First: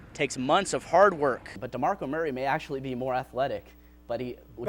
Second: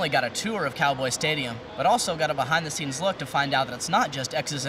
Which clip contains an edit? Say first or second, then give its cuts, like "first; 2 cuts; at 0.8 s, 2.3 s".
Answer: first; 1 cut; at 1.5 s